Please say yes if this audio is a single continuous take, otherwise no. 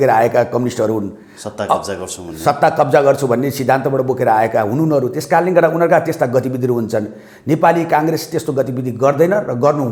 yes